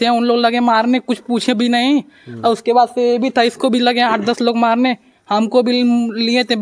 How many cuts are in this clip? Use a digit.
0